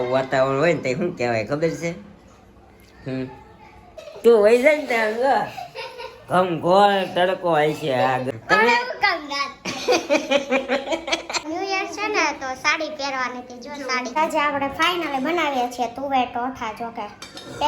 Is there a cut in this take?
yes; 4 cuts; at 4.0 s, 8.3 s, 11.4 s, 14.1 s

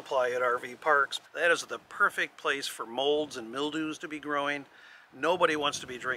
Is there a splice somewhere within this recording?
yes; 1 cut; at 1.2 s

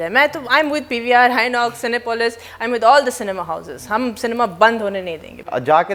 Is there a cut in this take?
no; 0 cuts

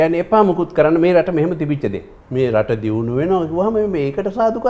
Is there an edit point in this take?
yes; 1 cut; at 2.2 s

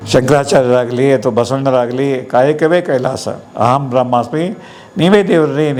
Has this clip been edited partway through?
no; 0 cuts

